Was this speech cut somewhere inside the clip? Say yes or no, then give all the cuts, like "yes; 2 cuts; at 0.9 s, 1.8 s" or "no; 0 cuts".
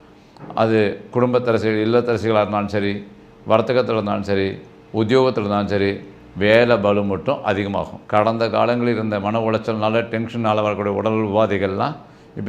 yes; 1 cut; at 8.0 s